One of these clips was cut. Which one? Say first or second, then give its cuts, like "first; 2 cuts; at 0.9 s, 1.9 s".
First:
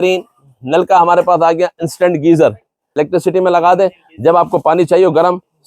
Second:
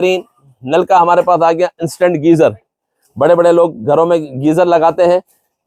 first; 1 cut; at 2.8 s